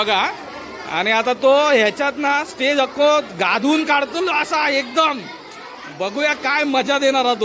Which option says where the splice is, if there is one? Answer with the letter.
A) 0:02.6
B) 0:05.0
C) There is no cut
C